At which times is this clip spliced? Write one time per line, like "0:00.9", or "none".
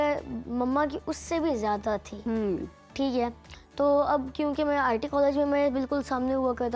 none